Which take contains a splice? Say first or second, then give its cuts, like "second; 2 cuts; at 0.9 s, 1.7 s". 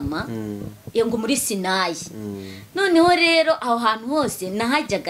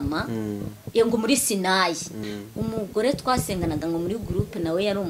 second; 1 cut; at 2.2 s